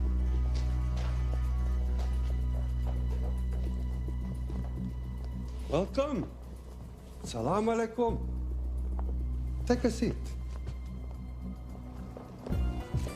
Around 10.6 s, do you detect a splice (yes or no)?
yes